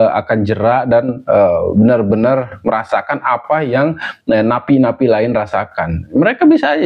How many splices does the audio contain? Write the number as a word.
zero